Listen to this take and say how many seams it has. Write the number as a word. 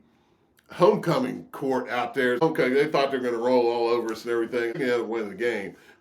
two